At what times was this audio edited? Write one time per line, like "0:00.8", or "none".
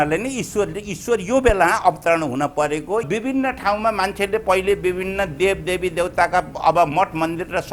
0:03.1

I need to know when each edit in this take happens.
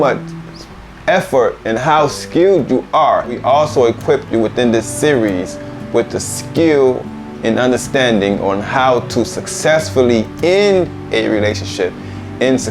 0:03.4

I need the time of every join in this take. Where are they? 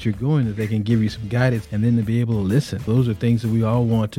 0:01.6
0:02.9

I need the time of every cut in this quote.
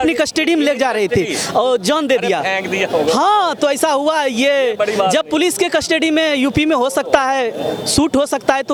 none

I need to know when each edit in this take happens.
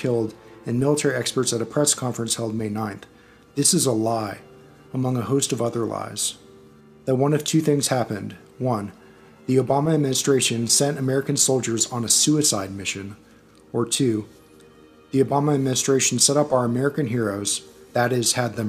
0:15.5

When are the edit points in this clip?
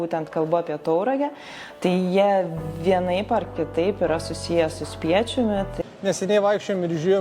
0:05.8

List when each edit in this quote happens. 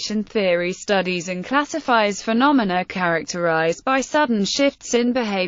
0:01.9

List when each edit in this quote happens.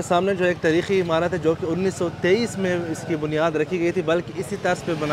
none

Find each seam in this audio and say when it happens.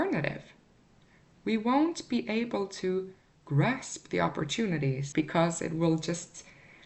0:05.0

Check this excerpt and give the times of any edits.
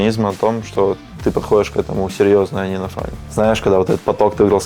0:01.1
0:03.2

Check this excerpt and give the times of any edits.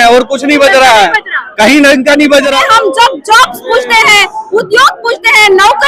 0:02.5

